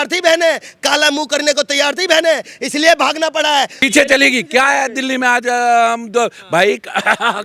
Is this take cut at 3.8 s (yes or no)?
yes